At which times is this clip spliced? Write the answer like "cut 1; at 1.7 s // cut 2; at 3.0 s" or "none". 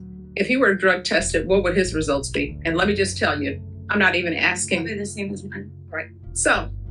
none